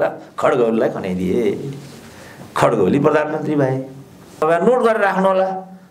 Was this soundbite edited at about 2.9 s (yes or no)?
no